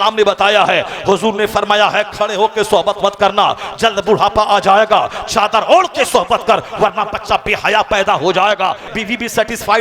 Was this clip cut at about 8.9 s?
yes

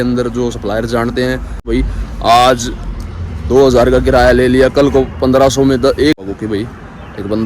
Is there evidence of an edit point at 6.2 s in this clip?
yes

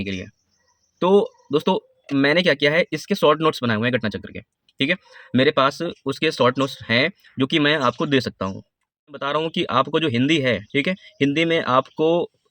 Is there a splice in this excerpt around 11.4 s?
no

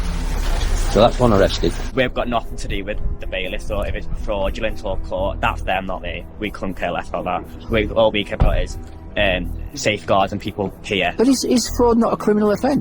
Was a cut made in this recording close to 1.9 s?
yes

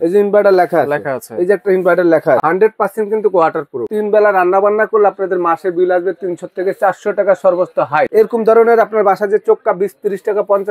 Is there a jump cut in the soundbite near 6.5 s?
no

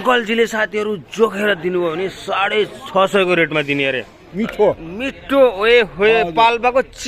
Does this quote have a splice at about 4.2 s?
yes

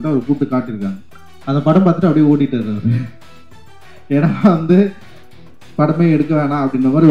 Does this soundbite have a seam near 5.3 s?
no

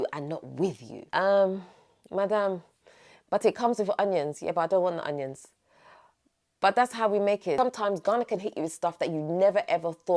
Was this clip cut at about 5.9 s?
no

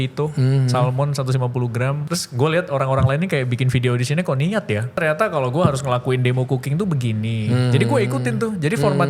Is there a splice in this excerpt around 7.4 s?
no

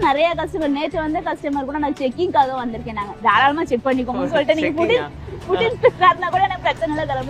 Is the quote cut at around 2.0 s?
no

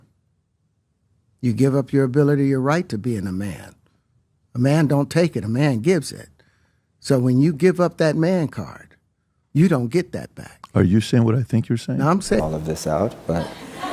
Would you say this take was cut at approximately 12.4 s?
yes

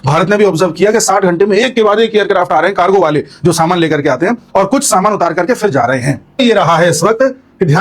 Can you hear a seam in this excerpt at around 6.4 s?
yes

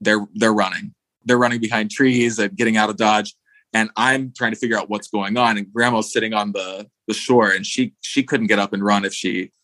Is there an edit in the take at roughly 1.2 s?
yes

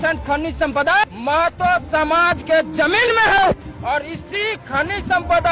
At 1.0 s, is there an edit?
yes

